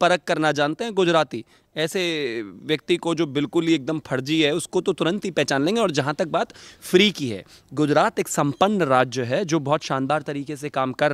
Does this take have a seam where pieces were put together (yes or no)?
no